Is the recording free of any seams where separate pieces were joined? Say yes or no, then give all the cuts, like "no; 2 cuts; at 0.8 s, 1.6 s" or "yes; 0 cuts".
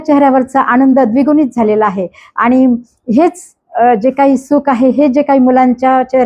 yes; 0 cuts